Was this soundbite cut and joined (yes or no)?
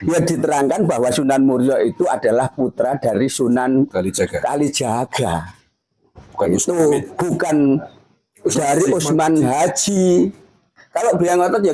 yes